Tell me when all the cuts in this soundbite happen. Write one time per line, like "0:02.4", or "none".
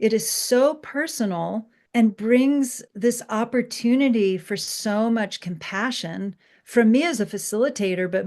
0:01.7
0:02.8